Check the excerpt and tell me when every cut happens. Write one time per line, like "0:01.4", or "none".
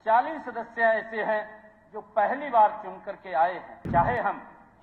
0:03.7